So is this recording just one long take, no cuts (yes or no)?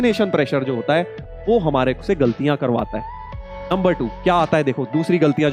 yes